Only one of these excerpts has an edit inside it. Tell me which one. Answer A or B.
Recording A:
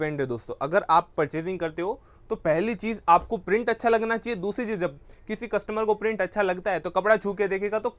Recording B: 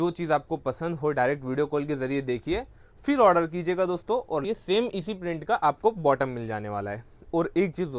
B